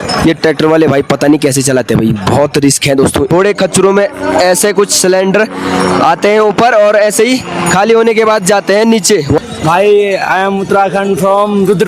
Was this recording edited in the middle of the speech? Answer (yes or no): yes